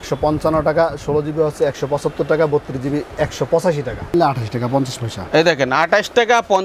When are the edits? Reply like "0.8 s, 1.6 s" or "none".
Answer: 4.1 s

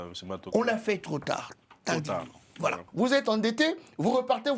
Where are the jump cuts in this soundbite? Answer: 2.8 s

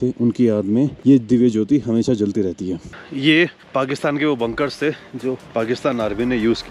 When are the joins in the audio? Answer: none

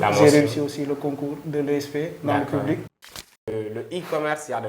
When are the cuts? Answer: 3.5 s

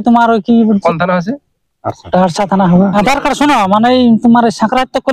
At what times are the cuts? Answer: 0.8 s, 2.9 s

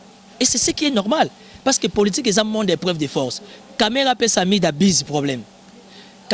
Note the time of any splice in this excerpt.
none

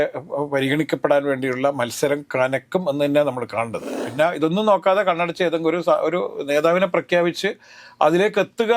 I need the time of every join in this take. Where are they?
4.0 s

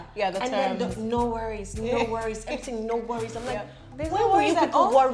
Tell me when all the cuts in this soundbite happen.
none

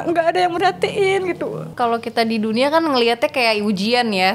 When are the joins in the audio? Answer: 1.7 s

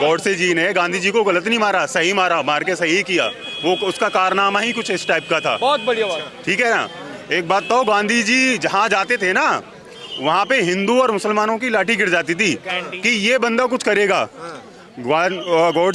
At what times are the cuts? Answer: none

